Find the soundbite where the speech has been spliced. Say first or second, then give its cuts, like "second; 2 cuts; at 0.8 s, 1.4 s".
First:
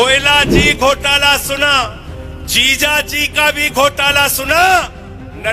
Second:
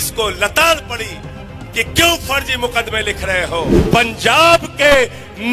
second; 1 cut; at 3.8 s